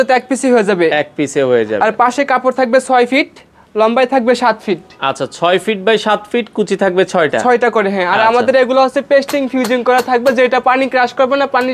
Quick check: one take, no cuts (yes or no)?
yes